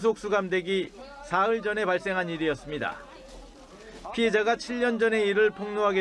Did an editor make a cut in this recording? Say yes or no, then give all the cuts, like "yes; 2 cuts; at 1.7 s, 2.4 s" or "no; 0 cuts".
no; 0 cuts